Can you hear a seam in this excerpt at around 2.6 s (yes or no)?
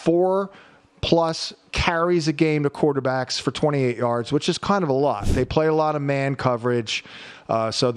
no